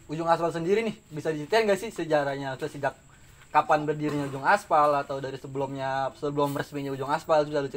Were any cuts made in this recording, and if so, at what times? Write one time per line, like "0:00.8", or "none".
none